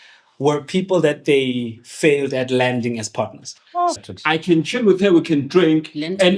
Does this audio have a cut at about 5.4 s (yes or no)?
no